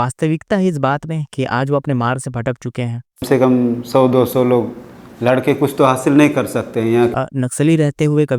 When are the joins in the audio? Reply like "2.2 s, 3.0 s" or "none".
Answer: 3.2 s, 7.1 s